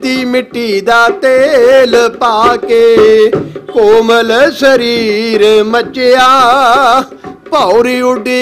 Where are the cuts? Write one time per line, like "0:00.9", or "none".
none